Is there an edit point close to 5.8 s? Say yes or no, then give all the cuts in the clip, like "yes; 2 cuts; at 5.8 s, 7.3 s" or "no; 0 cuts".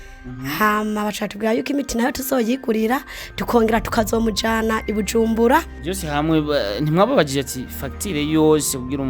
yes; 1 cut; at 5.8 s